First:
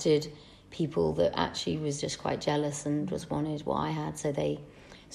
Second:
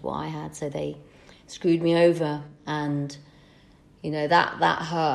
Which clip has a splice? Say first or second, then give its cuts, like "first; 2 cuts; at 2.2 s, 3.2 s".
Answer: second; 1 cut; at 2.6 s